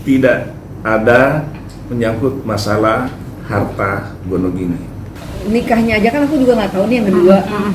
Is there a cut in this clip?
yes; 1 cut; at 4.9 s

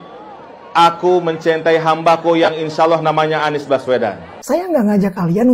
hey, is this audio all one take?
no; 1 cut; at 4.3 s

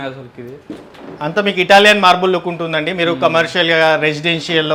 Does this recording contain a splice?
no; 0 cuts

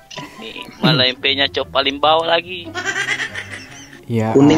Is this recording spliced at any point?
no; 0 cuts

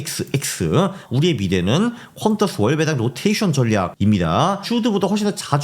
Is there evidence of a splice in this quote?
yes; 2 cuts; at 1.0 s, 3.9 s

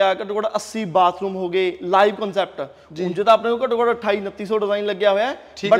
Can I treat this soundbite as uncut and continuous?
yes; 0 cuts

